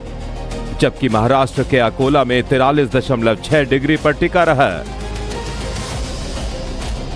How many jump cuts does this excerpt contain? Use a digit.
1